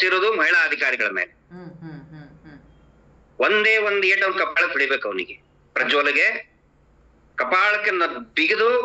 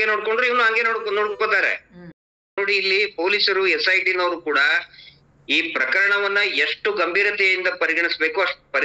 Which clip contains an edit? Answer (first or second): second